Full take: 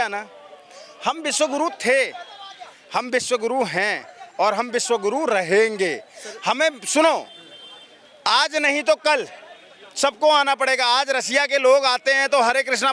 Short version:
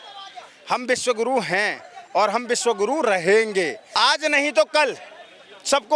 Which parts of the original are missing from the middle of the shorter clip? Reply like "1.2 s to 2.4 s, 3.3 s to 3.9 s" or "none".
6.1 s to 8.1 s